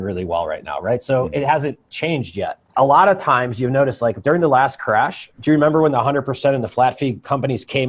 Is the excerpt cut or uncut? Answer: cut